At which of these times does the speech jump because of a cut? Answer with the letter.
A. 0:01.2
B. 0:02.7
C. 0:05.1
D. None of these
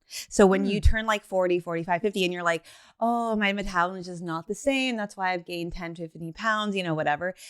D